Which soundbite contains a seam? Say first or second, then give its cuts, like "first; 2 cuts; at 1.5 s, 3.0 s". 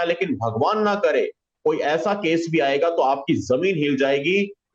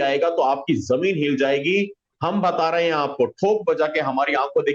first; 1 cut; at 1.5 s